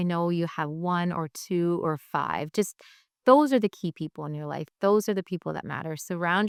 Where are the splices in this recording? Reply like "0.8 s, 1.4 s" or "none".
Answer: none